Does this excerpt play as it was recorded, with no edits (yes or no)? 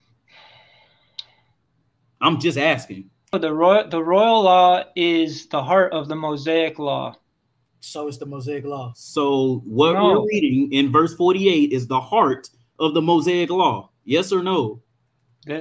no